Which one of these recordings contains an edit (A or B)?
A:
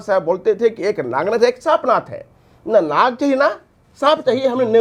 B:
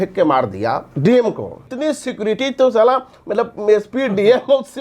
B